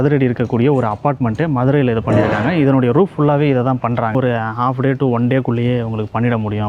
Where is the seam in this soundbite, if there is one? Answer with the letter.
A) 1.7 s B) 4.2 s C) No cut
B